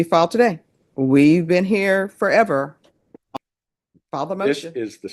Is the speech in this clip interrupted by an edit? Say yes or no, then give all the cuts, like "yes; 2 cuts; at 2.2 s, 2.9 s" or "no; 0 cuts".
yes; 1 cut; at 3.3 s